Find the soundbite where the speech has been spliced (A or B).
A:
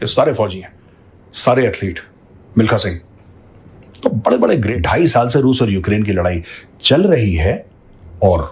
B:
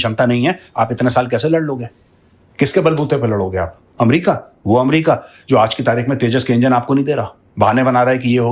A